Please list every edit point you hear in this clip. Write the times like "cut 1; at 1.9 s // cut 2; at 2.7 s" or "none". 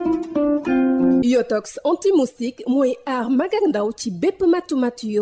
cut 1; at 1.0 s